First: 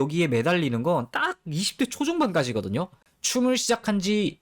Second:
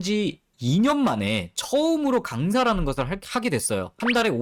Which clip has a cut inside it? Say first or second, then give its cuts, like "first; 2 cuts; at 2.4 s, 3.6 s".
first; 1 cut; at 3.1 s